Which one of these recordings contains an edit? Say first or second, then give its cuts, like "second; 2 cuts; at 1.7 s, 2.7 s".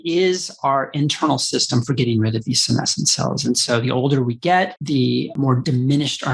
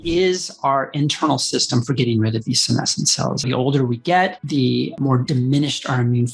second; 1 cut; at 3.4 s